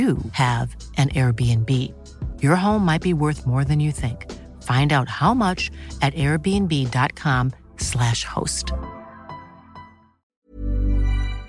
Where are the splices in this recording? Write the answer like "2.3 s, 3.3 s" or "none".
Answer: 10.5 s